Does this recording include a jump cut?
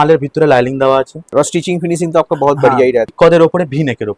yes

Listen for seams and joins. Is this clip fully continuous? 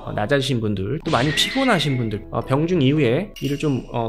no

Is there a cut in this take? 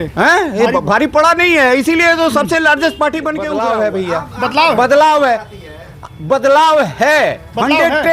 yes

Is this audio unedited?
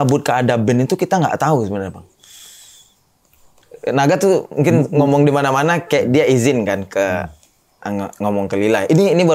yes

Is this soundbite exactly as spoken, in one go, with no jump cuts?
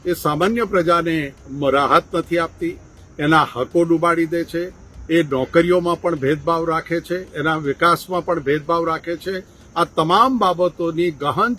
yes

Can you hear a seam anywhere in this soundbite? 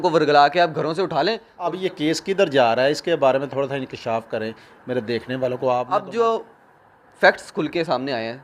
yes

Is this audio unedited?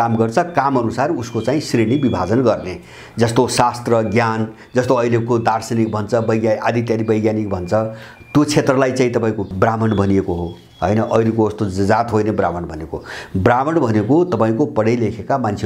no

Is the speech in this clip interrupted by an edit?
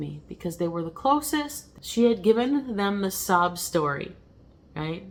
no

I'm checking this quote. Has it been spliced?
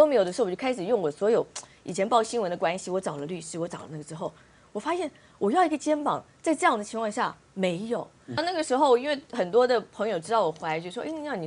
yes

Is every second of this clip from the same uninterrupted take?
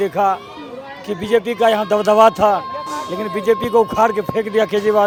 yes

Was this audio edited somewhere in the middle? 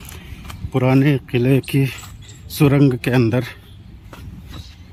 no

